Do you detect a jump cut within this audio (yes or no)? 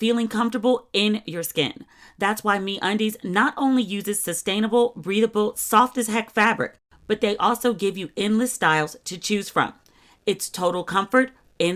no